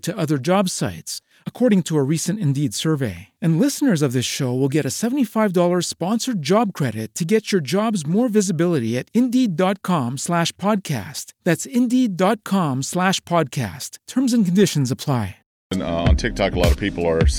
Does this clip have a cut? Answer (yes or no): yes